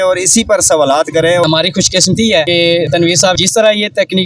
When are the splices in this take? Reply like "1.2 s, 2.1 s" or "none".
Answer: 1.4 s, 2.9 s